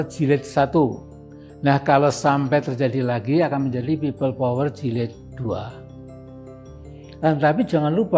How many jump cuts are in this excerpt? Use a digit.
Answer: 0